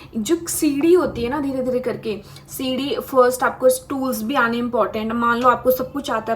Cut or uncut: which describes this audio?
uncut